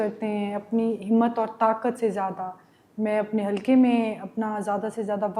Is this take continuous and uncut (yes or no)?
yes